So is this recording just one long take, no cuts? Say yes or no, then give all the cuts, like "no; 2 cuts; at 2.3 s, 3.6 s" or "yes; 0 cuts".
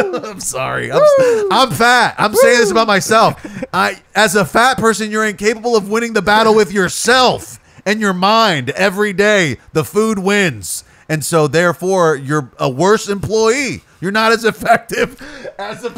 yes; 0 cuts